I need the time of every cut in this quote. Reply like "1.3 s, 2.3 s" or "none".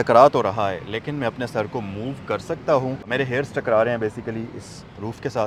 none